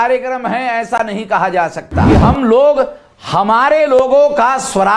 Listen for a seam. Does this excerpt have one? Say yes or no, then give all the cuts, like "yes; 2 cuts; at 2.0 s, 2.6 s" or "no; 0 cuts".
yes; 1 cut; at 2.1 s